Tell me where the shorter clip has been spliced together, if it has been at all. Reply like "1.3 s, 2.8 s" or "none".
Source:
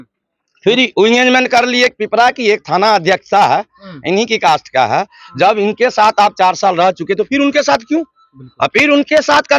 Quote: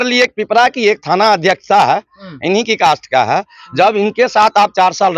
none